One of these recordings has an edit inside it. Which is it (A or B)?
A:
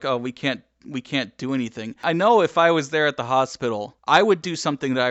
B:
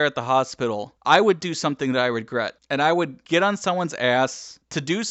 A